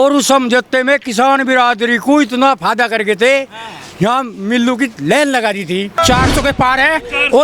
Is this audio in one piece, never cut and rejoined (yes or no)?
no